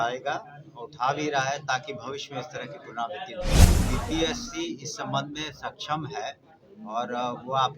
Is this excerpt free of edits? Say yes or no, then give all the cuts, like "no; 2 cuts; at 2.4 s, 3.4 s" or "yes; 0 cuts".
no; 1 cut; at 3.8 s